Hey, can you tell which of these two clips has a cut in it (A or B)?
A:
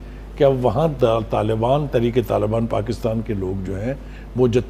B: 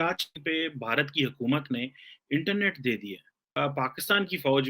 B